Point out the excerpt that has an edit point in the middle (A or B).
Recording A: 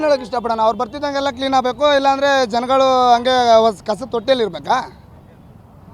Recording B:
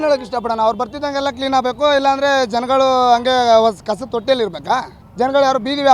B